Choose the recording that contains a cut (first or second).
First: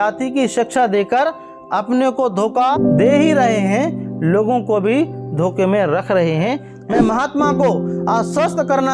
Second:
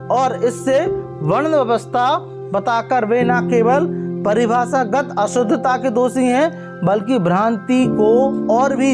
first